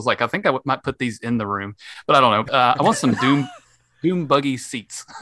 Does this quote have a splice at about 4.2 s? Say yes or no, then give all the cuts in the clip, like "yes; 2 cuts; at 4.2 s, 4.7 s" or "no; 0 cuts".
no; 1 cut; at 2.5 s